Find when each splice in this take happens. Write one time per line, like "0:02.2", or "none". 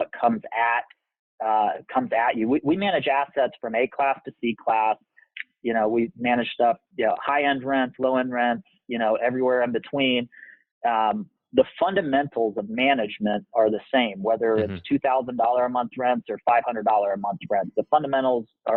none